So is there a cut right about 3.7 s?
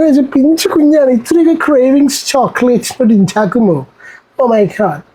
no; 0 cuts

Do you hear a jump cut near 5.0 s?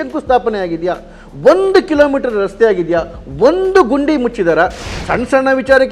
yes; 1 cut; at 5.0 s

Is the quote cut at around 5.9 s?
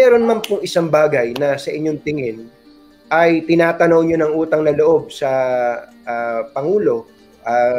no; 0 cuts

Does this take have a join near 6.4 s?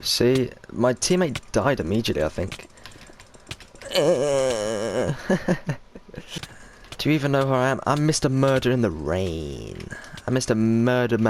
yes; 1 cut; at 6.4 s

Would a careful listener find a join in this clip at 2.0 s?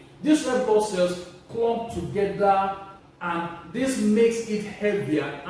no; 0 cuts

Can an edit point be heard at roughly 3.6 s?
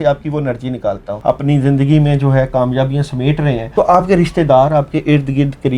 yes; 2 cuts; at 1.1 s, 3.6 s

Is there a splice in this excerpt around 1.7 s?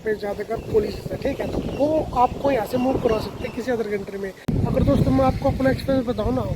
no; 1 cut; at 4.4 s

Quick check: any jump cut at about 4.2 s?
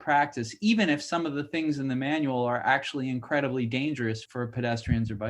yes; 1 cut; at 4.2 s

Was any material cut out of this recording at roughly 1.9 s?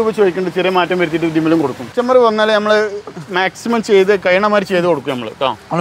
yes; 1 cut; at 1.9 s

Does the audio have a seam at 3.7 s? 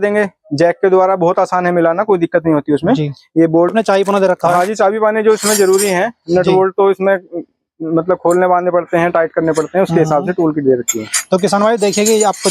yes; 1 cut; at 3.7 s

